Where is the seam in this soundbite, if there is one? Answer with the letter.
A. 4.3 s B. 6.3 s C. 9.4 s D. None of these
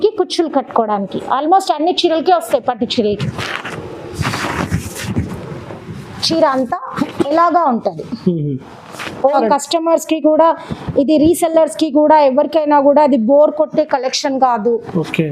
C